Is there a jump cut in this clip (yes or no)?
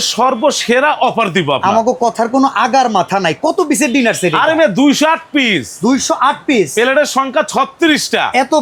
no